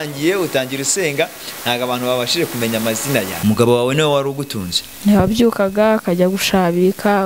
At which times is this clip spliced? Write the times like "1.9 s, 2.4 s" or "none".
3.3 s